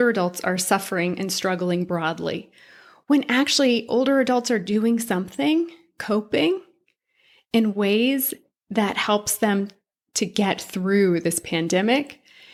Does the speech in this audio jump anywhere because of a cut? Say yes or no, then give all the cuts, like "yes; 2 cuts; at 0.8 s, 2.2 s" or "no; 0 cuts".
no; 0 cuts